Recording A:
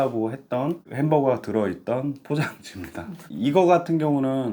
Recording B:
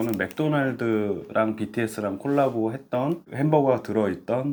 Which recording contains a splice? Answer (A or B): A